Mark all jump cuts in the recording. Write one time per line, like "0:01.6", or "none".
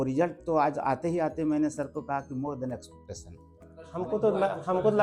0:03.8